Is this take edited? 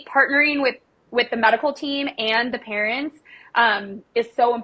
no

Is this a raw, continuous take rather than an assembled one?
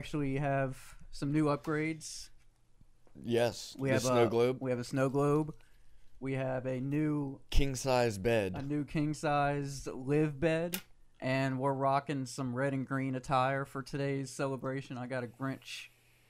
yes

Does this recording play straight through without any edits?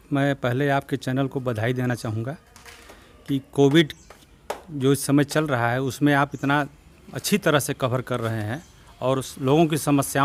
yes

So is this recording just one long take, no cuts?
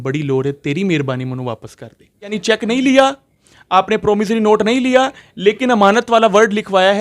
no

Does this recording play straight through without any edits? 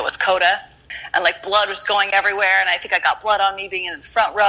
no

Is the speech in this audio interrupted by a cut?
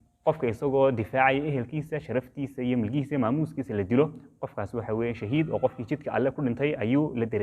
no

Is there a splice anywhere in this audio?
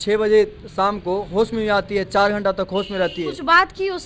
no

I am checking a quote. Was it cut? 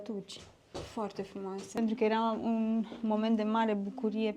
yes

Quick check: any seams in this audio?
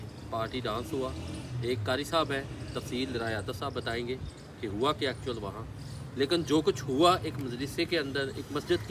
no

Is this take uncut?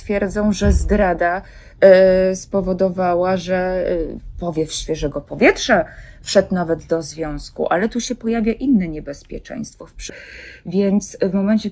no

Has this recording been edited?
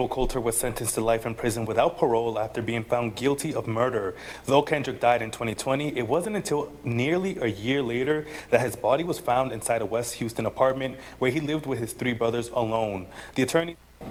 no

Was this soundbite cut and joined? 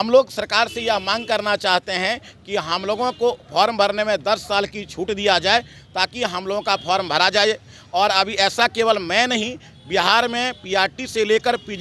no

